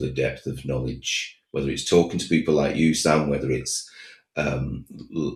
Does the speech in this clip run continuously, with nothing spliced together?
yes; 0 cuts

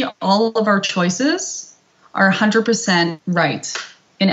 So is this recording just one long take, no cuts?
no; 1 cut; at 3.2 s

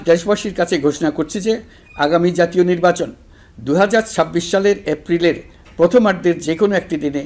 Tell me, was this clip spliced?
no; 0 cuts

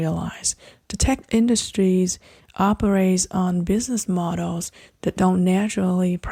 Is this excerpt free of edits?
yes; 0 cuts

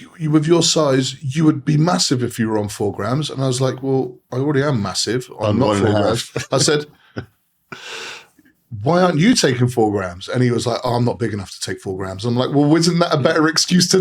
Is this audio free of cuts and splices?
yes; 0 cuts

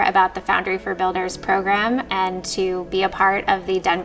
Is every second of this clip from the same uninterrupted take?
yes; 0 cuts

